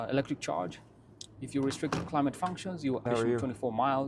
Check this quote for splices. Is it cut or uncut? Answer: cut